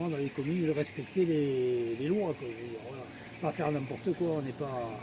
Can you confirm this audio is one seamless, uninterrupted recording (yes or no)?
yes